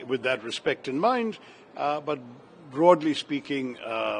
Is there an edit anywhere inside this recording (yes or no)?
no